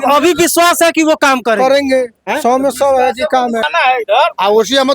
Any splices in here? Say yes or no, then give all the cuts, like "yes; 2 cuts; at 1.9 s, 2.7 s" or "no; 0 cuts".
yes; 1 cut; at 3.7 s